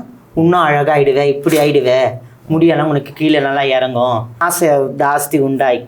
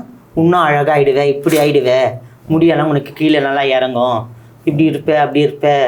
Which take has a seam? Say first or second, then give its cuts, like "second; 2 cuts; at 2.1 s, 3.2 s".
first; 1 cut; at 4.4 s